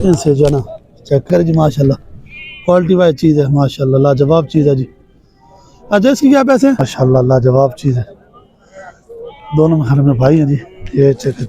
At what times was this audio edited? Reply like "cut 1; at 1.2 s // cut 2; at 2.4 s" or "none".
cut 1; at 1.3 s // cut 2; at 6.8 s